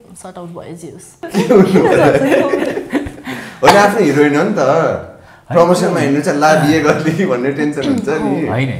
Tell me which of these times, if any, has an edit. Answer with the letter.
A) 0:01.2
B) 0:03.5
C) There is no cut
A